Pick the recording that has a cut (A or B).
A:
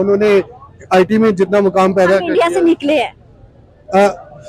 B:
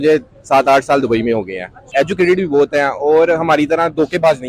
B